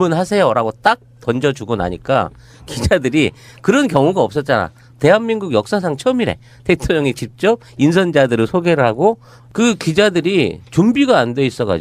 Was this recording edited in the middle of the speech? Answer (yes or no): yes